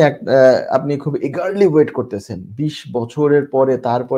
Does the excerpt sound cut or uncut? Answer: uncut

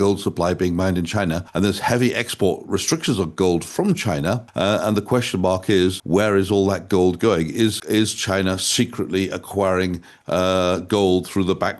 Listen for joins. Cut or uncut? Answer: cut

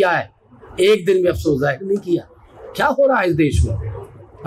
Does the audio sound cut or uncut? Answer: uncut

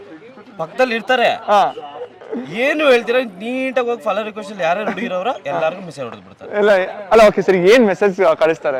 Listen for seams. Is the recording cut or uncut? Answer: uncut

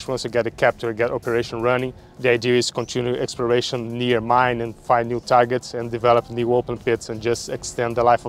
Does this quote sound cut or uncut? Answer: uncut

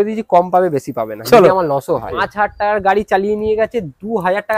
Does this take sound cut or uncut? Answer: cut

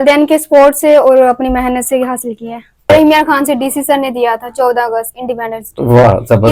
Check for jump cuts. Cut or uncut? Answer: cut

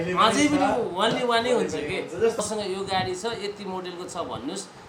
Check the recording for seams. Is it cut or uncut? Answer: cut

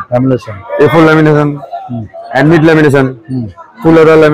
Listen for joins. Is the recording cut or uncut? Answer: uncut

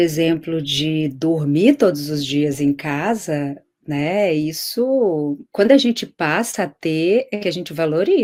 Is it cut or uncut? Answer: uncut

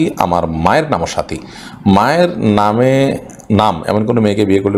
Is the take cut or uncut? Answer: uncut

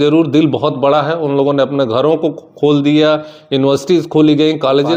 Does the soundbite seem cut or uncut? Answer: uncut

